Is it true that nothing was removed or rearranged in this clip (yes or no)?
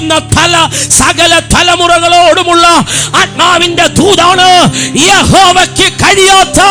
yes